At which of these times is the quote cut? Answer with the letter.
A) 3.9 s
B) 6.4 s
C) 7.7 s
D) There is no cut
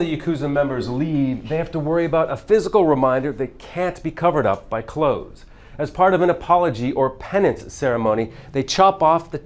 D